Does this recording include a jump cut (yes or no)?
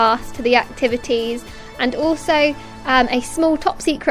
yes